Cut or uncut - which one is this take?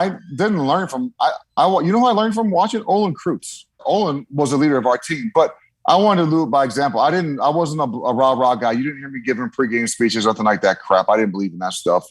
cut